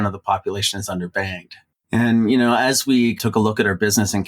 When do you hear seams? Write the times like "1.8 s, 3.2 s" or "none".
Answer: 1.6 s, 3.2 s